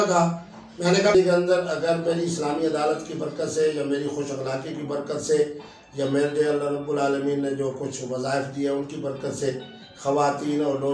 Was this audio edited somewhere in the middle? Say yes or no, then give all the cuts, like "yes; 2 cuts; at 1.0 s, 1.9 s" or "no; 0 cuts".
yes; 1 cut; at 1.1 s